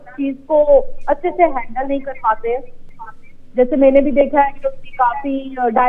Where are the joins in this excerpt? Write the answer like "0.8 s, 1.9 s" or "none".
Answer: none